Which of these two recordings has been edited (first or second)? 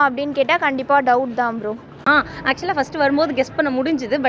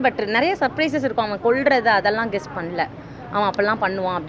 first